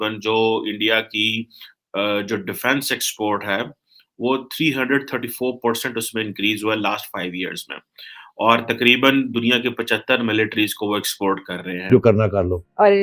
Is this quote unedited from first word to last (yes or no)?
no